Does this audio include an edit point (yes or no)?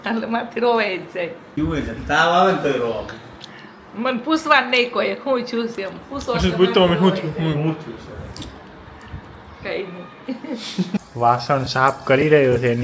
yes